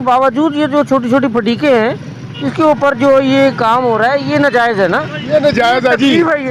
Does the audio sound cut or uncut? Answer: uncut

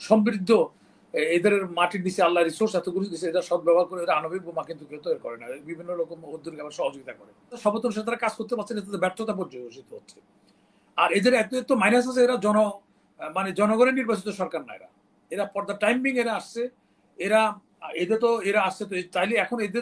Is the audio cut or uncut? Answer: cut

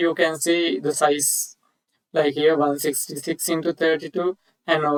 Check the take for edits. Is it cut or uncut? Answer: uncut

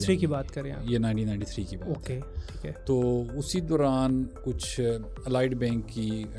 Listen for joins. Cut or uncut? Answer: uncut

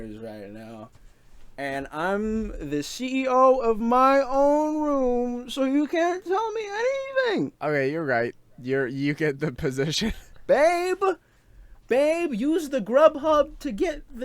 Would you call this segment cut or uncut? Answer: cut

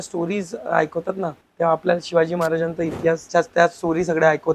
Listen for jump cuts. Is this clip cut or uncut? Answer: cut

